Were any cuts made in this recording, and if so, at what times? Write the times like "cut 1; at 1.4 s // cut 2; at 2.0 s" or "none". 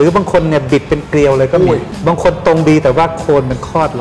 cut 1; at 1.9 s